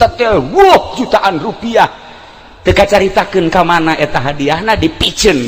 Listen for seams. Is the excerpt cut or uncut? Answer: uncut